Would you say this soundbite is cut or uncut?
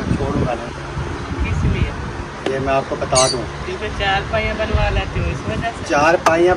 uncut